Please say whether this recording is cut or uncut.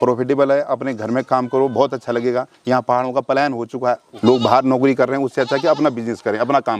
cut